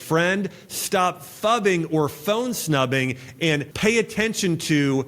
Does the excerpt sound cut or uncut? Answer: cut